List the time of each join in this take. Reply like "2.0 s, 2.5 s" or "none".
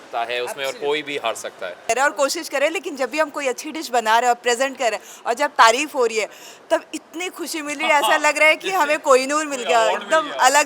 1.9 s